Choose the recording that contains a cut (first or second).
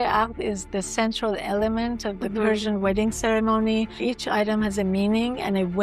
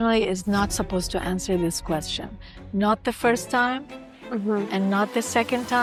first